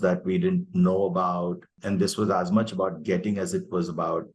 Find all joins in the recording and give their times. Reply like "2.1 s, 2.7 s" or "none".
1.8 s